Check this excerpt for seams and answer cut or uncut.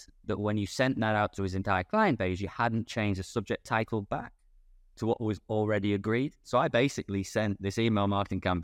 uncut